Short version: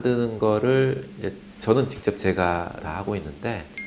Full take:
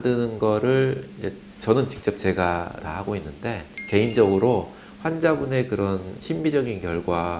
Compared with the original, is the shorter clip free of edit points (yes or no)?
yes